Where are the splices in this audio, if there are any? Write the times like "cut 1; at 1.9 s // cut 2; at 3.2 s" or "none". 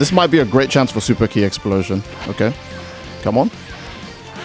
cut 1; at 2.1 s